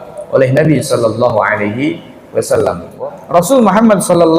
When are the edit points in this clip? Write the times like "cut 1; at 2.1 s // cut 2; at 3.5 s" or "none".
cut 1; at 2.9 s